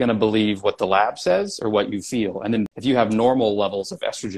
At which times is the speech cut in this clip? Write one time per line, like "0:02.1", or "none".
0:02.7